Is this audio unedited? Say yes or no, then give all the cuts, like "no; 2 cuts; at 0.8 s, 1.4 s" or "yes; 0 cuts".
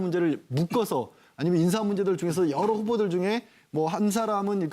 no; 1 cut; at 1.5 s